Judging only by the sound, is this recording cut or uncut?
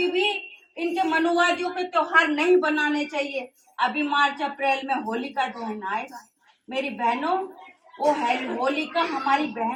uncut